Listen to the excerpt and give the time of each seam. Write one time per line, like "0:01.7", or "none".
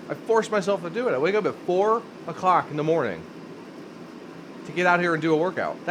none